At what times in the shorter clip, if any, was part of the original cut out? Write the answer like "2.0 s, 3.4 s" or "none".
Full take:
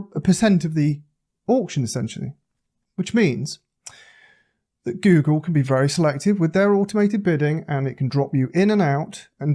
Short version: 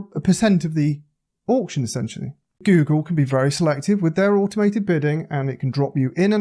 2.6 s

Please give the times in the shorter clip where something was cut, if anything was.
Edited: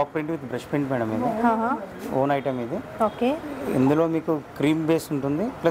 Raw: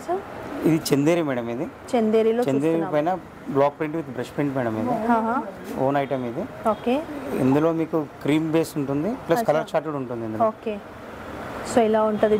none

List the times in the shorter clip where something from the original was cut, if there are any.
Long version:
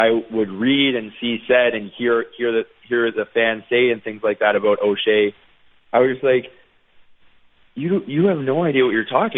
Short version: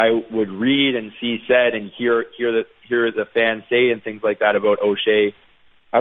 none

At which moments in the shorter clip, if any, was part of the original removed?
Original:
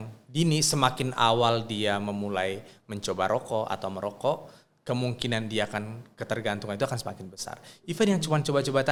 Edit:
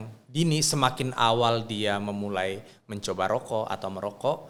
none

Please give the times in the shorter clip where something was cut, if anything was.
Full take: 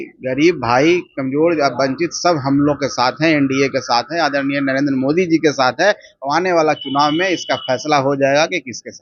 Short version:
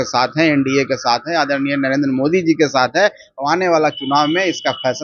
none

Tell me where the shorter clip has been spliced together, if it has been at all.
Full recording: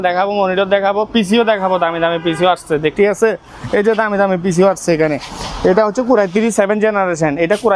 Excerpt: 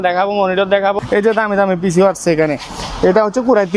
1.0 s

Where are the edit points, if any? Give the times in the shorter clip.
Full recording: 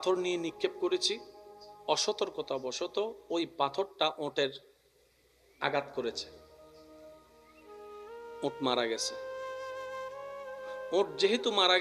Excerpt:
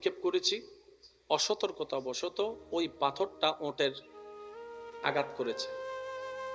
5.6 s

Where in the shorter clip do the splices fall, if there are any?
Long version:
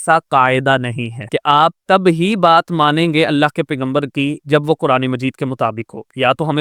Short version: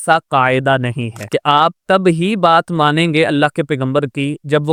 none

